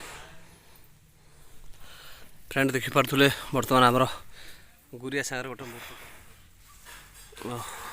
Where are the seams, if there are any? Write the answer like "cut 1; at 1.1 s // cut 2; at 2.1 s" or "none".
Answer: cut 1; at 5.8 s